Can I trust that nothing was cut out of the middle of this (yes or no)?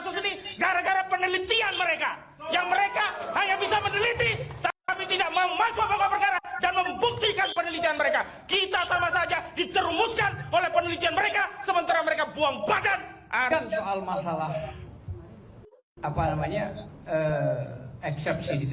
no